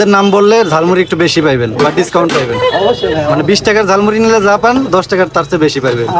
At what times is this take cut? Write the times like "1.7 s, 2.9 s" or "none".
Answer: none